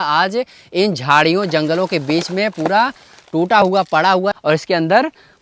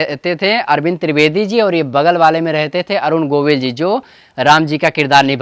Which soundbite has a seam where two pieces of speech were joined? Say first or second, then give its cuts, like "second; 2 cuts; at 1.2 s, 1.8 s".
first; 1 cut; at 4.3 s